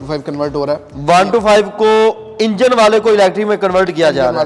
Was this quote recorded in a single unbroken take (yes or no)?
yes